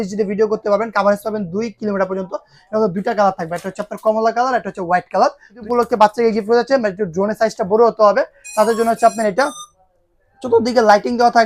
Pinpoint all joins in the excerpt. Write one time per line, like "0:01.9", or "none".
0:05.6